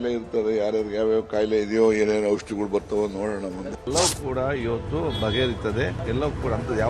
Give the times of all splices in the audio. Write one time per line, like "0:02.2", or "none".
0:03.8
0:06.0